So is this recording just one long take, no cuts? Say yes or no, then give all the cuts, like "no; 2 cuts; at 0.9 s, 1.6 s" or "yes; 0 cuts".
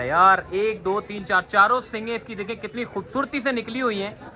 yes; 0 cuts